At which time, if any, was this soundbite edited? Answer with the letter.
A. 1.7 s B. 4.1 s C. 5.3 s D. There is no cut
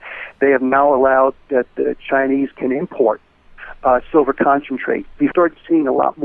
C